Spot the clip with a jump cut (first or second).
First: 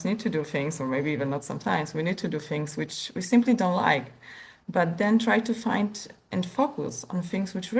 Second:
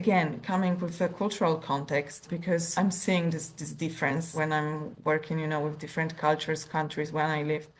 second